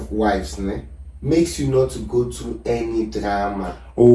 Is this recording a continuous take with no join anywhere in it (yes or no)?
yes